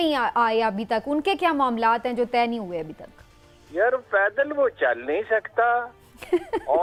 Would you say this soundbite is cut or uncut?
uncut